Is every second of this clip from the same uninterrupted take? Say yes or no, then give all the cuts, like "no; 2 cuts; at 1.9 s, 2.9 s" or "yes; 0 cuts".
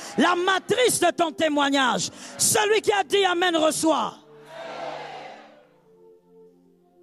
yes; 0 cuts